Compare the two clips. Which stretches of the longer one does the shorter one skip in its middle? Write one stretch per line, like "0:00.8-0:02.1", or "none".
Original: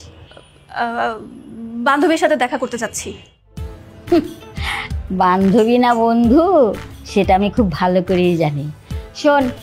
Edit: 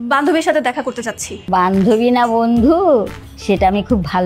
0:03.0-0:05.0